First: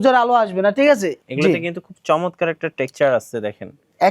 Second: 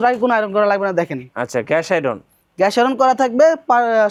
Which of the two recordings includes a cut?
first; 1 cut; at 1.1 s

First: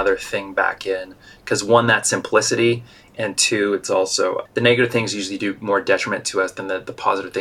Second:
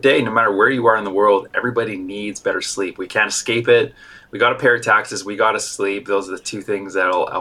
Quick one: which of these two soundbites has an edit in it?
first; 1 cut; at 4.4 s

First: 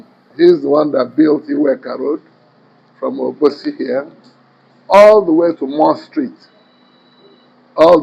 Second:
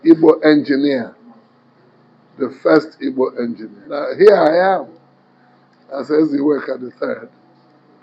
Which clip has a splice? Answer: second; 1 cut; at 4.0 s

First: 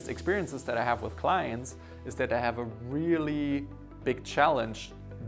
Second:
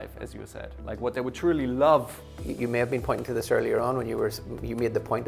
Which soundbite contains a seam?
second; 1 cut; at 2.4 s

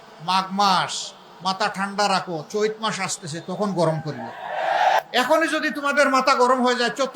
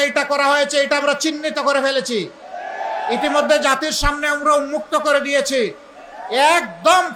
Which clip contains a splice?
first; 1 cut; at 5.0 s

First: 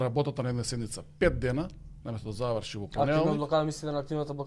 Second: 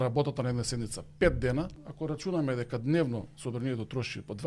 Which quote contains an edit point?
second; 1 cut; at 1.9 s

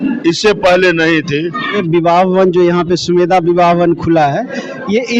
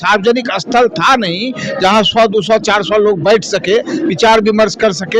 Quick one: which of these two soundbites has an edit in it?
first; 1 cut; at 1.8 s

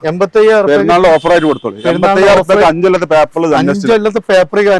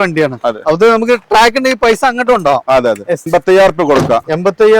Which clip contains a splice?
second; 1 cut; at 3.3 s

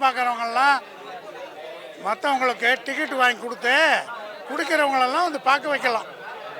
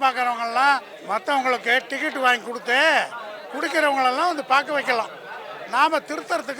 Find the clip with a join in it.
second; 1 cut; at 0.9 s

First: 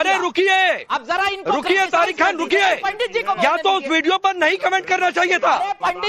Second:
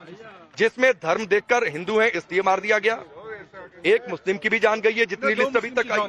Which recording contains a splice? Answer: second; 1 cut; at 2.2 s

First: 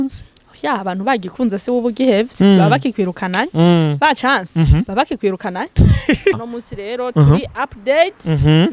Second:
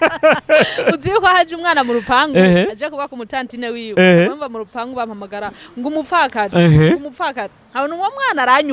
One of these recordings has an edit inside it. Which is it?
first; 1 cut; at 6.4 s

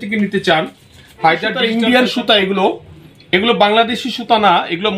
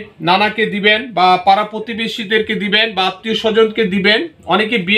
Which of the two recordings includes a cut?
first; 1 cut; at 1.6 s

